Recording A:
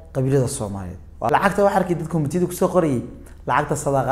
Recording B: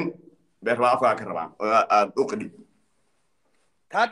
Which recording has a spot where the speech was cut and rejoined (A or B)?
A